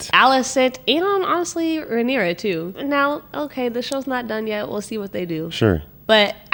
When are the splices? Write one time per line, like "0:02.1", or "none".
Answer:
none